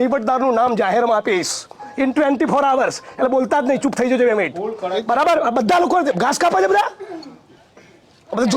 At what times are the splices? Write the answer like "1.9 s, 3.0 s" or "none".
none